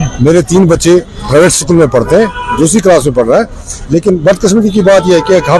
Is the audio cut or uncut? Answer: cut